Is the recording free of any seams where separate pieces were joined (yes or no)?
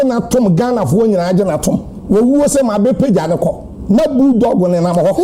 no